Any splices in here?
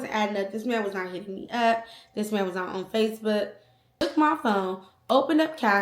yes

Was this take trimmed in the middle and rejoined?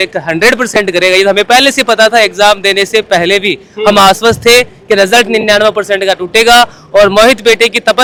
no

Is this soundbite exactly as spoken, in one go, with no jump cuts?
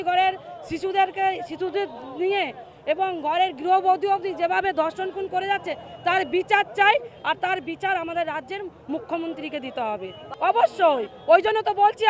yes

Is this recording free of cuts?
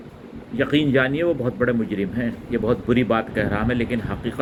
yes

